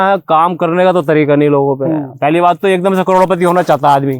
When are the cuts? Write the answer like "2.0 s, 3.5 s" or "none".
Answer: 2.1 s